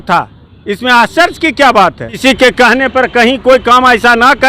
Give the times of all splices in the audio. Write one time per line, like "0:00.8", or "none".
0:02.2